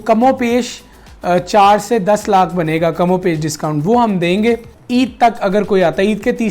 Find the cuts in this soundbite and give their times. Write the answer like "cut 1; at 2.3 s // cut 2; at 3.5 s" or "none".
cut 1; at 4.8 s